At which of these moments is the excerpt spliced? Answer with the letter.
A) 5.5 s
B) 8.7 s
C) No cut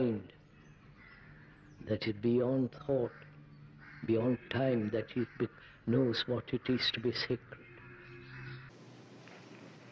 B